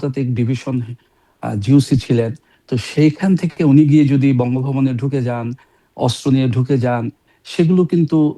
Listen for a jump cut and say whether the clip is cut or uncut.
uncut